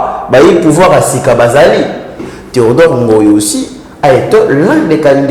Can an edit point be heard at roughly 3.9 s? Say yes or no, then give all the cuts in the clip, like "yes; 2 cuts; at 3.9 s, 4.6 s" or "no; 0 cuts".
no; 1 cut; at 2.3 s